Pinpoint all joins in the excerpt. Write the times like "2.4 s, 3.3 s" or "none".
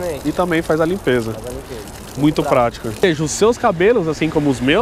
3.0 s